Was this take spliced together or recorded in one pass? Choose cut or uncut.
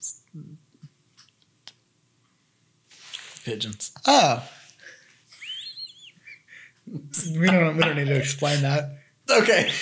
uncut